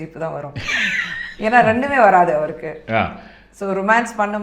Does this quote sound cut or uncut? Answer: uncut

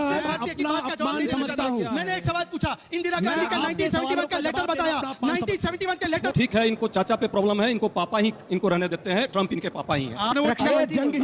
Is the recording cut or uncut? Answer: cut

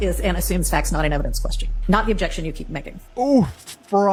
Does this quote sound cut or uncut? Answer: uncut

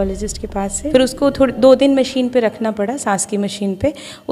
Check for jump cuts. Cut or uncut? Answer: cut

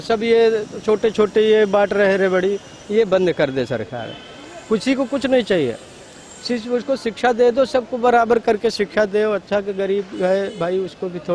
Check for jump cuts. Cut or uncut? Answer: uncut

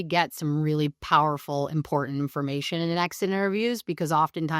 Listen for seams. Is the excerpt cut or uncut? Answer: cut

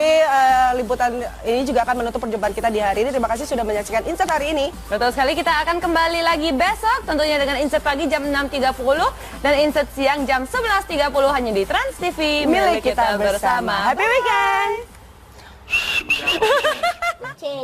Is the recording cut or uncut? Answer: cut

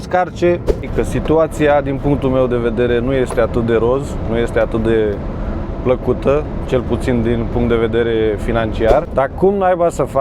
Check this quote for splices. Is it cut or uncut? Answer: cut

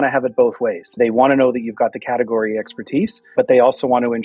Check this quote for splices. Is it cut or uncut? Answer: cut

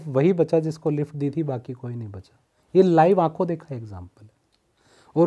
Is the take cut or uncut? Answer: uncut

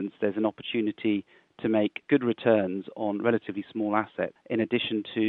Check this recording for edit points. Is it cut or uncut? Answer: cut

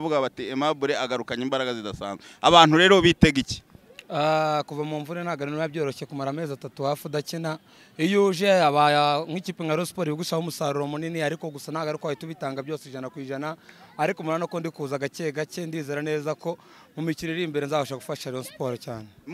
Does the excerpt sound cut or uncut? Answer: uncut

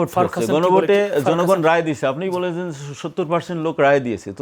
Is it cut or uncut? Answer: uncut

